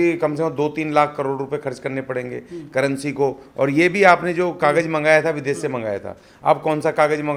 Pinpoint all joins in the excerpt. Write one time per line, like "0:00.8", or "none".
none